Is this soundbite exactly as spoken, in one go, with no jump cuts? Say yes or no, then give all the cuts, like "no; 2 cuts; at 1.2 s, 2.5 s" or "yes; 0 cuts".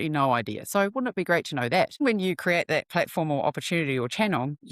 no; 1 cut; at 2.0 s